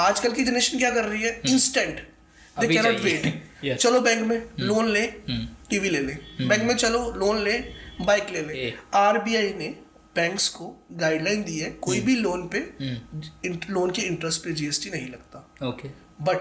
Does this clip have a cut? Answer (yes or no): yes